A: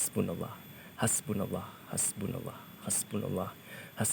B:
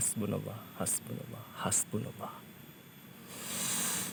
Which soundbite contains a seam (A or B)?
A